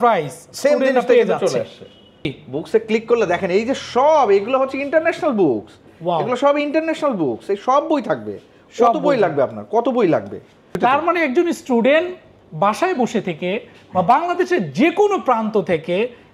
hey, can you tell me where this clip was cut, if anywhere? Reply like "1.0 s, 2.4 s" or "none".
2.4 s, 10.8 s